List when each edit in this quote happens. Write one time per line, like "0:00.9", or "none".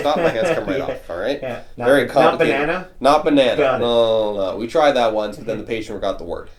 none